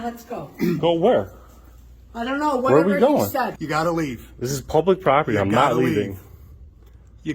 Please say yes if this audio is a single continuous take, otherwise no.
no